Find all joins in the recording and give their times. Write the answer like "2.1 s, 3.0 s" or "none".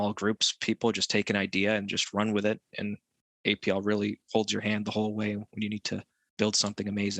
6.2 s